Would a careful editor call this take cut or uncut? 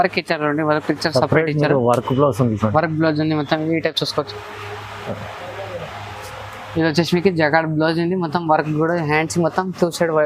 uncut